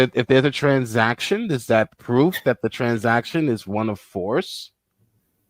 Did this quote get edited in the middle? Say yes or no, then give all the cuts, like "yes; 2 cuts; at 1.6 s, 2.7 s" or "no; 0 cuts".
no; 0 cuts